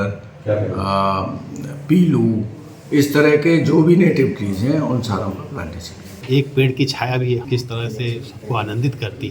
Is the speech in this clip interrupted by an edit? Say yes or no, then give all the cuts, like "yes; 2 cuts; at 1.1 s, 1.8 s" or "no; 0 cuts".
yes; 2 cuts; at 6.1 s, 7.4 s